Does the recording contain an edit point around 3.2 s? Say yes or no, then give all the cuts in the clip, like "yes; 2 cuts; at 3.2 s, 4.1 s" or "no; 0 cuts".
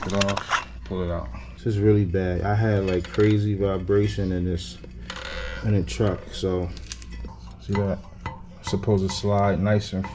no; 2 cuts; at 1.4 s, 7.5 s